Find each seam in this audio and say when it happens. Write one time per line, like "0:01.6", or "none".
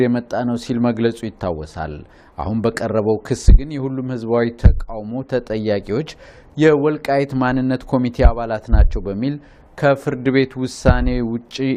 none